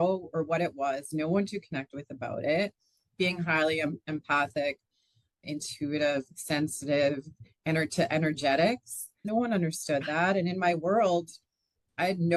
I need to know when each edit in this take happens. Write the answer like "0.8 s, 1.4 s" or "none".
9.2 s